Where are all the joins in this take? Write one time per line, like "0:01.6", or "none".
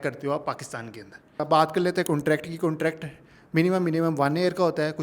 0:01.3